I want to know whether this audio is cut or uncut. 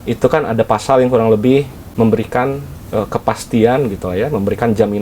cut